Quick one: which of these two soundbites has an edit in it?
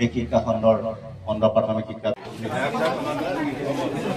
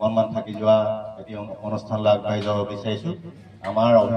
first; 1 cut; at 2.0 s

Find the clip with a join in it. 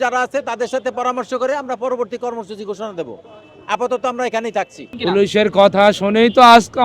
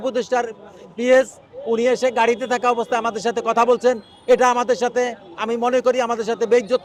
first; 1 cut; at 4.9 s

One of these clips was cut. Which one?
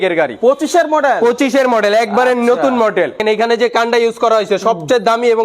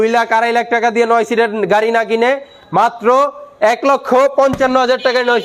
first; 1 cut; at 3.2 s

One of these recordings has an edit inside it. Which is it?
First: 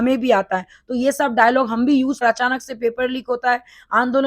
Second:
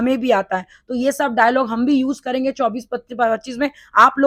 first; 1 cut; at 2.2 s

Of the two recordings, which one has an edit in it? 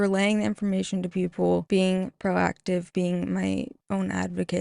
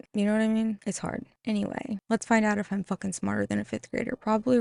first; 2 cuts; at 1.6 s, 2.9 s

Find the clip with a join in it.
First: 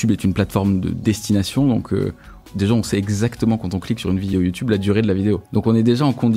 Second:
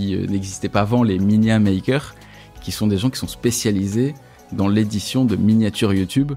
first; 4 cuts; at 0.9 s, 2.5 s, 4.3 s, 5.4 s

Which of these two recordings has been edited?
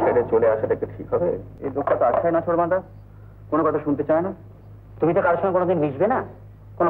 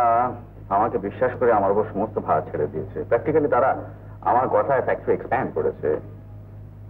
first; 1 cut; at 1.5 s

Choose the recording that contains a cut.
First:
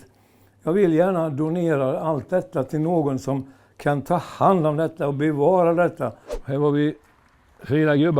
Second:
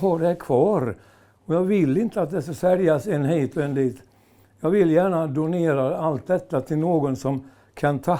first; 1 cut; at 6.3 s

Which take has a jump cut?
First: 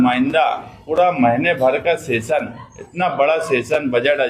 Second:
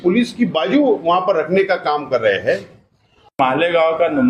second; 1 cut; at 3.3 s

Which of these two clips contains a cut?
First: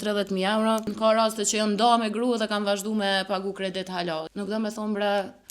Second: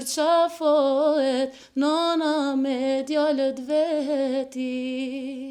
first; 2 cuts; at 0.9 s, 4.3 s

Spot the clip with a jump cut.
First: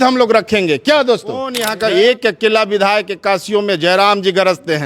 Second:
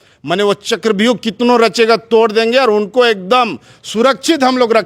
first; 1 cut; at 1.6 s

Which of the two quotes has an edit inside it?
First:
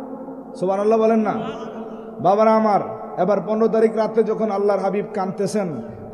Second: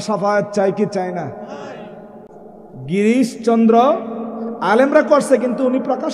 second; 1 cut; at 2.2 s

